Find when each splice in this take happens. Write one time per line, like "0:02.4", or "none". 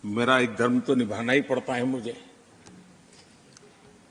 none

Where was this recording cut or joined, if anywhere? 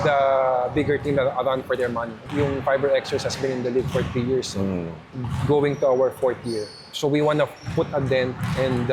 0:02.2

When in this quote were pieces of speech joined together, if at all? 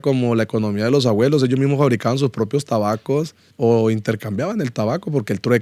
0:03.4

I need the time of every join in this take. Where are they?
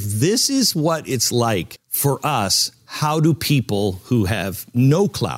0:01.8

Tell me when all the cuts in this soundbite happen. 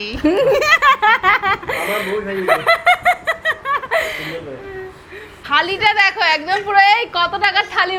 none

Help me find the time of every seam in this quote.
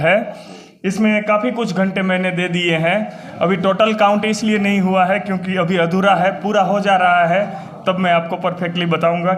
none

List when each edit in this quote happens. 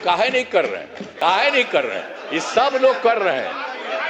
none

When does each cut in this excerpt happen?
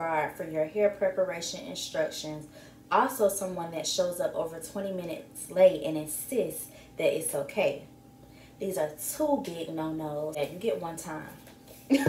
0:10.4

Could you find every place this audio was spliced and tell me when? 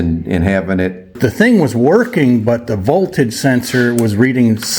0:01.1

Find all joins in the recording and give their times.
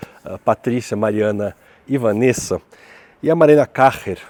none

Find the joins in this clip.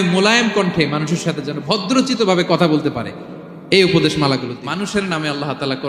0:04.5

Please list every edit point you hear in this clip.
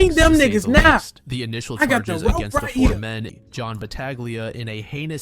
0:03.4

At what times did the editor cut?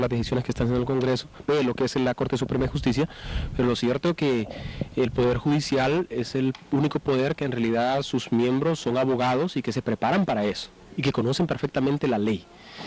0:03.7

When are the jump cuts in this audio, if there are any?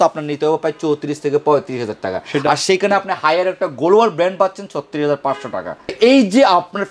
none

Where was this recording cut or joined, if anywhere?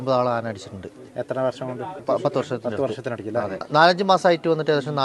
0:02.0
0:03.6

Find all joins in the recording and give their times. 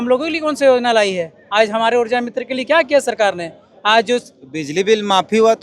none

